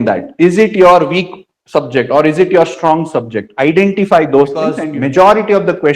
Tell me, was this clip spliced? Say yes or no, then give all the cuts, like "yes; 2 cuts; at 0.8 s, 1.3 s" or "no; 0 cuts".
yes; 1 cut; at 4.8 s